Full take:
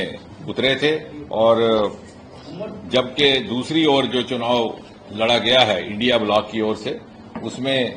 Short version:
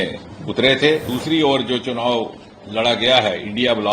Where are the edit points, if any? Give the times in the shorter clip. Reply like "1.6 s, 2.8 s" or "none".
1.1 s